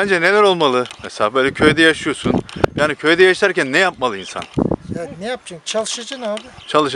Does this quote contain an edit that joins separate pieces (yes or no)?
yes